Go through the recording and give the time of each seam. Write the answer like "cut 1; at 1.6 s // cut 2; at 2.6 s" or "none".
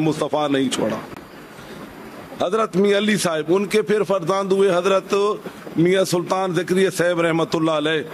none